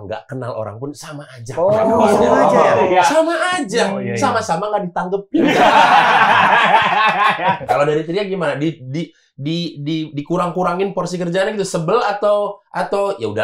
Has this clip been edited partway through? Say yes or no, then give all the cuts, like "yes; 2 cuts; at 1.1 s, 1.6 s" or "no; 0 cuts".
yes; 1 cut; at 7.6 s